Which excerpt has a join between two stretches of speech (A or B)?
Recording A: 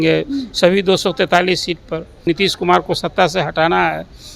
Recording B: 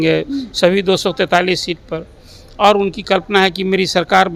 A